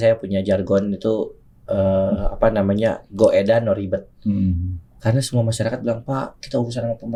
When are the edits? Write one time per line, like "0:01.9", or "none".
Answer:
none